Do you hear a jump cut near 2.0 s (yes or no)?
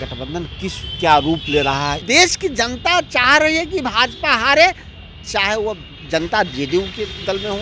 yes